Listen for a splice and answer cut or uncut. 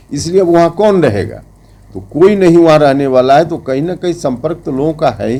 uncut